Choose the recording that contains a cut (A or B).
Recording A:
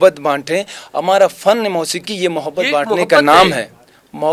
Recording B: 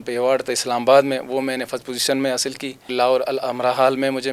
B